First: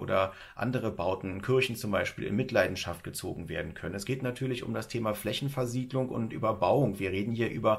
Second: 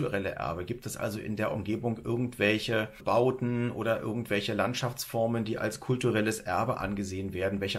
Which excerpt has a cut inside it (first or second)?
second